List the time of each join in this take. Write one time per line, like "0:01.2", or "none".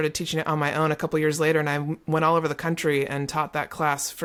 none